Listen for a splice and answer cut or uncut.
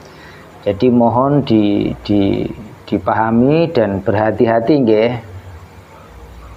uncut